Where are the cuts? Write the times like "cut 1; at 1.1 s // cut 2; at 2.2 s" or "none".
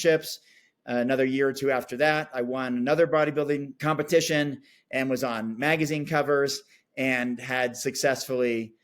cut 1; at 3.7 s